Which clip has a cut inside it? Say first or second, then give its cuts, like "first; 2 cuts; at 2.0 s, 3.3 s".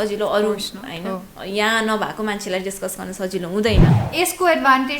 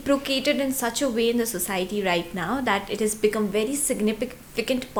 first; 1 cut; at 3.9 s